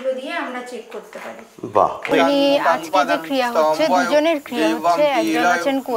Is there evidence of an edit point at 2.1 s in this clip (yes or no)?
yes